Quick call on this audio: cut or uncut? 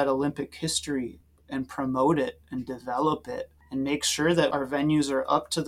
cut